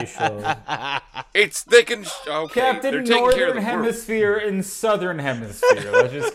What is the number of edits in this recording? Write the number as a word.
zero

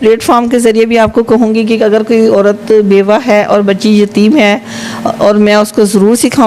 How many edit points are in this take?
zero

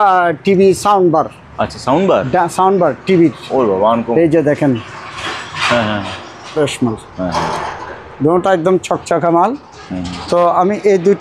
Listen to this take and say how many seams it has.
one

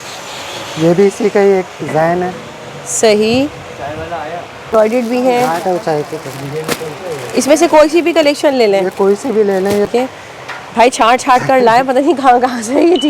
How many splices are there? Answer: two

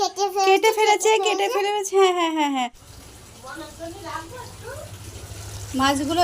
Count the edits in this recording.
one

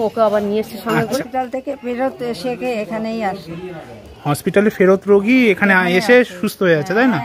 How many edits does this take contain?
one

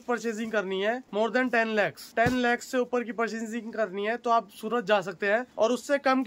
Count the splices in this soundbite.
zero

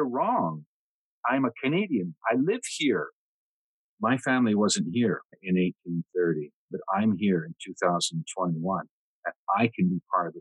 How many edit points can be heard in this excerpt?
four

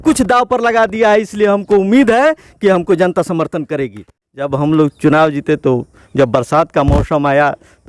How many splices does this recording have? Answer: one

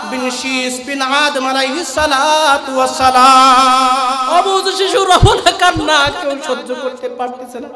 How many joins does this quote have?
one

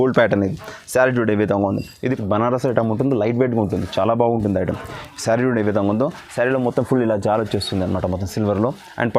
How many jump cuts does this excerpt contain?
one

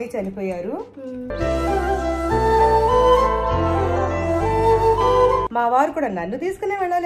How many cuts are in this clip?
two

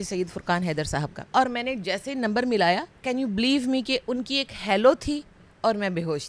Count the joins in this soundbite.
two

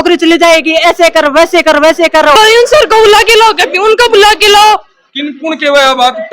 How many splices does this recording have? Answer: one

